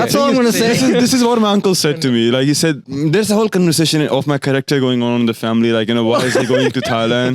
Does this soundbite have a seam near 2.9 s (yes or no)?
yes